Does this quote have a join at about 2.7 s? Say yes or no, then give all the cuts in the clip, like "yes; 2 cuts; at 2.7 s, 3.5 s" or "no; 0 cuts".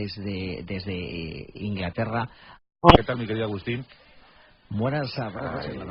no; 0 cuts